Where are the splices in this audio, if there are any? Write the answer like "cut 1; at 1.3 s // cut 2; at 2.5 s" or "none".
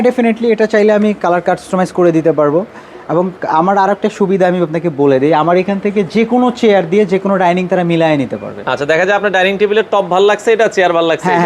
none